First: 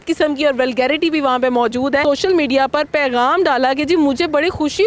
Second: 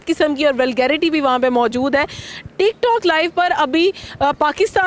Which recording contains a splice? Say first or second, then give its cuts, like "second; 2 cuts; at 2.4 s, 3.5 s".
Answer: first; 1 cut; at 2.0 s